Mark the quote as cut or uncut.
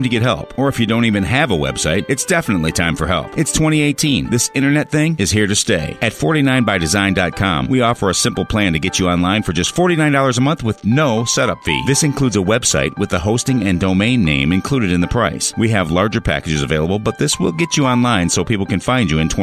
uncut